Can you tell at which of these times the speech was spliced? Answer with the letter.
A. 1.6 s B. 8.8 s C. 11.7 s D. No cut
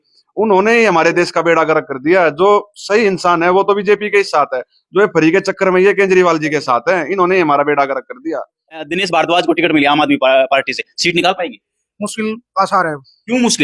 B